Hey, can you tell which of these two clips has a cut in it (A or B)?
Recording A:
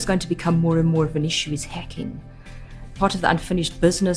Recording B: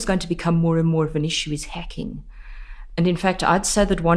A